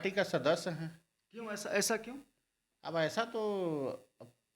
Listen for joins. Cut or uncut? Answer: uncut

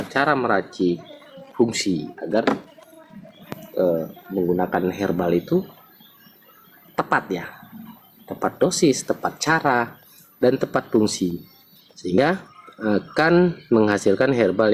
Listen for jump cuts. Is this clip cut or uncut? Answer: uncut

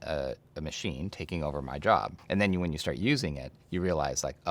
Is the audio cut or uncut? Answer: cut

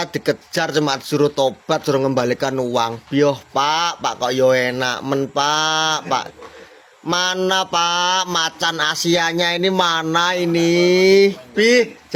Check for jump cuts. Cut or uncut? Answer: uncut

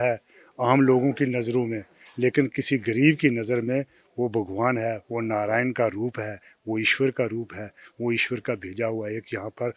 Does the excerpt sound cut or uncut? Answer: uncut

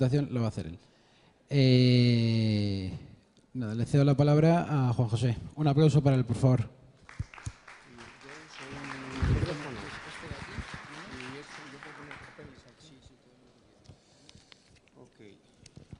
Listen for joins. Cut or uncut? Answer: cut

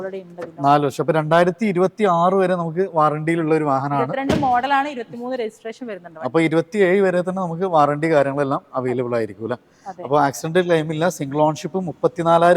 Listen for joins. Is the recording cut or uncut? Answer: uncut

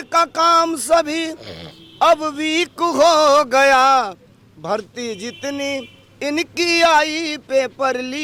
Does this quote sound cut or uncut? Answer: uncut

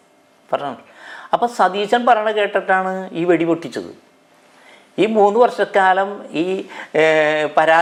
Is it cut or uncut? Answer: uncut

